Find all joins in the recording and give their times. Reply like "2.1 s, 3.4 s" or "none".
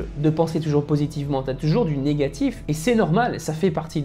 none

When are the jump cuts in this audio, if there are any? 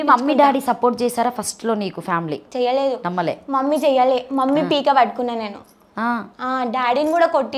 2.5 s

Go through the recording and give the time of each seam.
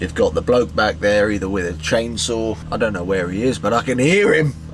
2.6 s

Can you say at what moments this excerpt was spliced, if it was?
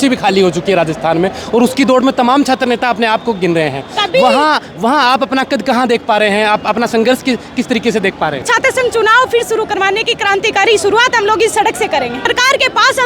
8.4 s, 12.3 s

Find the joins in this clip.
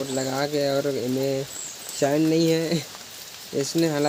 none

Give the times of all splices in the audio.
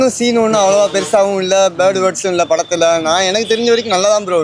none

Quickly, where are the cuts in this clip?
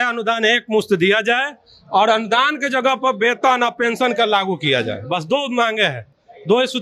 none

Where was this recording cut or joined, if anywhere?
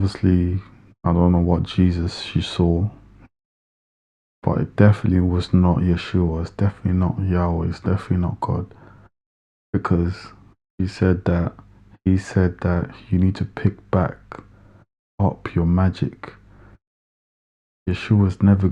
none

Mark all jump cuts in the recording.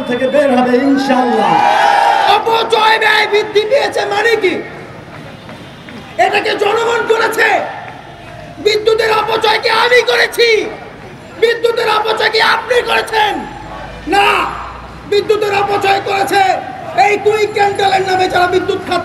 2.3 s

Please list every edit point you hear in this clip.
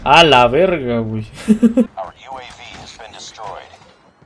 1.9 s

